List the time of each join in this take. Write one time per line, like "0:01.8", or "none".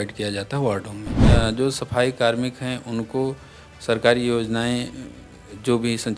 0:01.3